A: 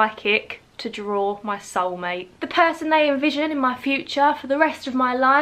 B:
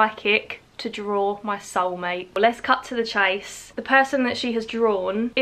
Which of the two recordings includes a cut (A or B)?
B